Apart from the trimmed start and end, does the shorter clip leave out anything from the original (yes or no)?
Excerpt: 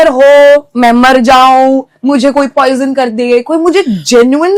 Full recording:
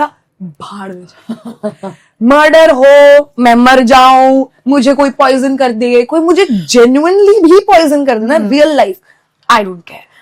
no